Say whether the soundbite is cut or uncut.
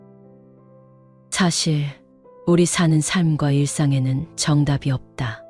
uncut